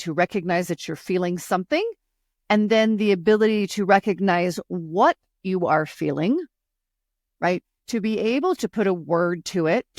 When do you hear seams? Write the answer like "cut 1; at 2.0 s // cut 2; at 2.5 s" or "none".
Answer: none